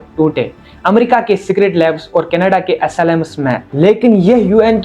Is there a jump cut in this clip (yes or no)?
yes